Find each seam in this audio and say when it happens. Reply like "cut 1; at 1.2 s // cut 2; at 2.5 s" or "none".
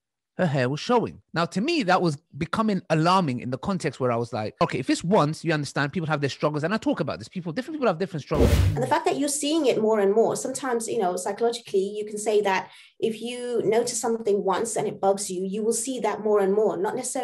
cut 1; at 1.2 s // cut 2; at 4.6 s // cut 3; at 8.5 s

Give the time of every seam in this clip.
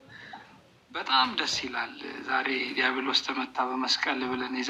none

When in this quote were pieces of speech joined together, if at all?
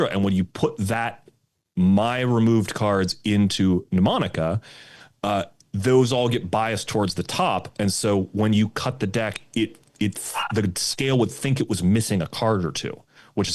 none

